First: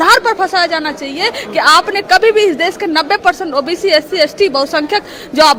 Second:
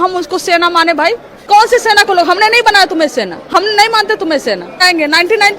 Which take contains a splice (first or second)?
second